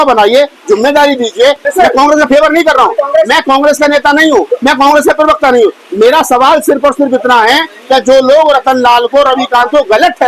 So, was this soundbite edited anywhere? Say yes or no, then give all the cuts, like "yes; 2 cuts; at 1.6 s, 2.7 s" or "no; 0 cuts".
yes; 1 cut; at 1.7 s